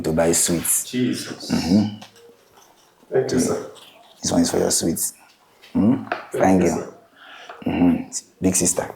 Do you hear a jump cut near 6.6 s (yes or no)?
no